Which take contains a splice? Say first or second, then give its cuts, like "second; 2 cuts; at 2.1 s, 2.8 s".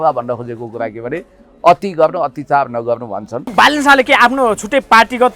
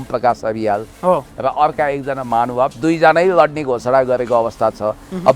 first; 1 cut; at 3.5 s